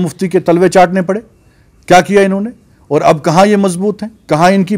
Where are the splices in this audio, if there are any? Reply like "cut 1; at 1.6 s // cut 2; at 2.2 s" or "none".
none